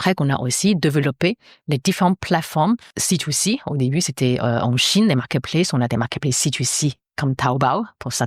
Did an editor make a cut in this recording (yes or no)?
yes